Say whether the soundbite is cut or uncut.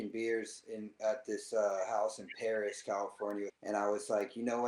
cut